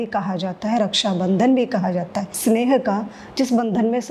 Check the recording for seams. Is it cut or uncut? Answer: cut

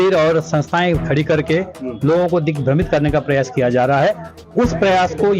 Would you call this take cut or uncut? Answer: uncut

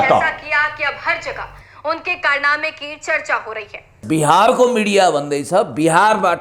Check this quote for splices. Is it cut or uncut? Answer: cut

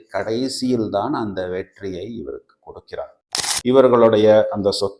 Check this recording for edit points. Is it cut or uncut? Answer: cut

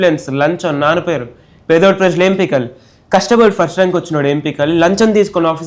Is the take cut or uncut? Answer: uncut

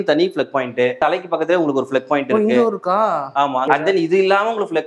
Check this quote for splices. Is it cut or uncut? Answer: cut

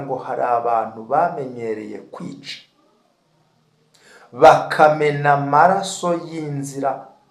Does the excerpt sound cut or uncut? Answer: uncut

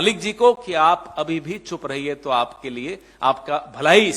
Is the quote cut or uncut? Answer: uncut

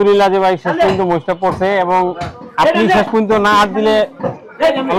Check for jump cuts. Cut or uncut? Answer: uncut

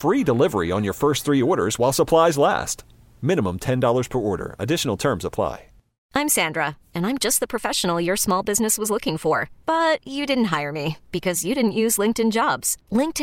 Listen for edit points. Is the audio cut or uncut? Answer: cut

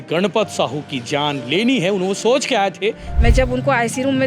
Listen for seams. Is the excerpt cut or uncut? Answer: cut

